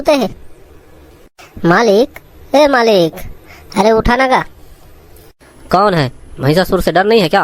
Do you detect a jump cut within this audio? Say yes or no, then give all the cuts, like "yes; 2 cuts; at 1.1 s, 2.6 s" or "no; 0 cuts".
no; 0 cuts